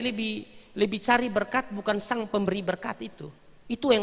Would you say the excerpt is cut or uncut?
uncut